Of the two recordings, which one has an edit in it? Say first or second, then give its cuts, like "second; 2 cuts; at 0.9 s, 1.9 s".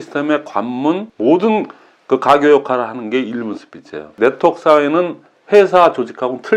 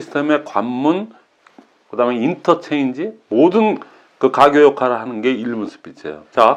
first; 2 cuts; at 1.1 s, 4.1 s